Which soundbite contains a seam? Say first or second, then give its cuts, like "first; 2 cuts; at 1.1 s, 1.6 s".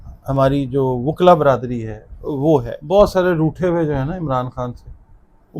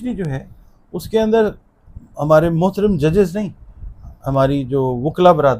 first; 1 cut; at 2.8 s